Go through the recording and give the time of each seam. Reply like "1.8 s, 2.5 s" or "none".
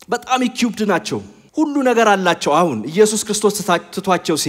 1.4 s